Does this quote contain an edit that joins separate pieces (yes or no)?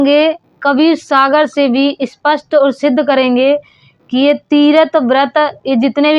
no